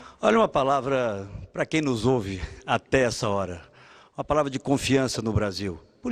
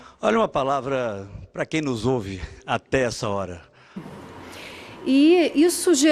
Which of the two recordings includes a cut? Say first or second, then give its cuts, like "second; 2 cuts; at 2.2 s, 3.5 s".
first; 1 cut; at 4.1 s